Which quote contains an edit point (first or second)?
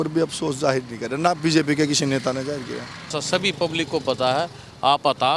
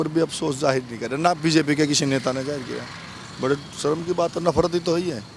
first